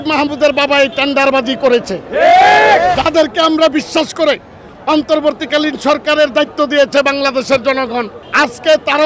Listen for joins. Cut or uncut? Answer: cut